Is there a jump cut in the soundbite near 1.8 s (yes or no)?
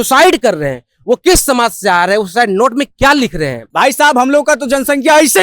no